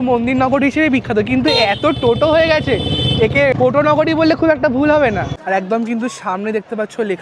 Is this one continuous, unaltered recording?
no; 2 cuts; at 3.5 s, 5.3 s

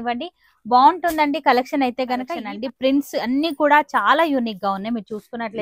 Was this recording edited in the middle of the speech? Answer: yes; 1 cut; at 2.4 s

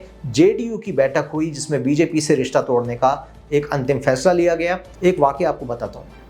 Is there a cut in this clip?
yes; 1 cut; at 4.9 s

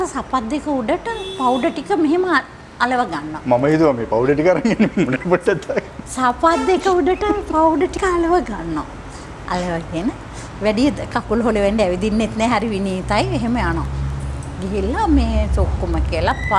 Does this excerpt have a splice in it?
no; 0 cuts

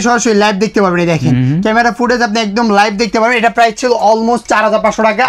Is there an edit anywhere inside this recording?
no; 0 cuts

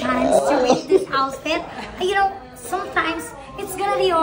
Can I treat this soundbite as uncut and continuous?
yes; 0 cuts

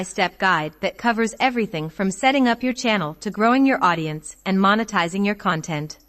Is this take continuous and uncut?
yes; 0 cuts

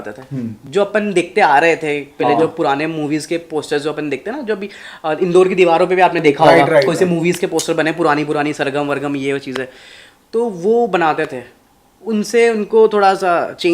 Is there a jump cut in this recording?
no; 0 cuts

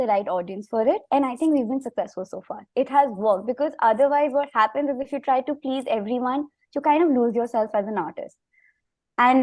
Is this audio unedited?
yes; 0 cuts

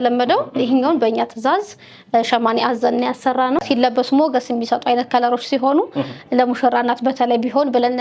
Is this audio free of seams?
no; 1 cut; at 3.6 s

